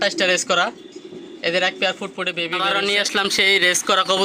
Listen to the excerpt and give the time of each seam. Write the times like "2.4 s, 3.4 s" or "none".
2.2 s